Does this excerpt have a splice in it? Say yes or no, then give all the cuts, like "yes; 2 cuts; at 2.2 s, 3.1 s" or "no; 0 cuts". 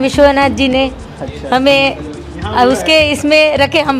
no; 0 cuts